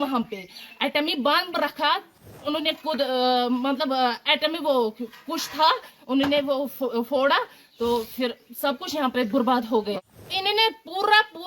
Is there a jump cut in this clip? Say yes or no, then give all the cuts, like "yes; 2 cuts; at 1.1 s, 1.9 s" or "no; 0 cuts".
yes; 2 cuts; at 2.3 s, 9.9 s